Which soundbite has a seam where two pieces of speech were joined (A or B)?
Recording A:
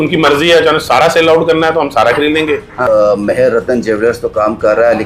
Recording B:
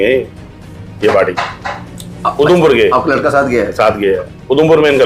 A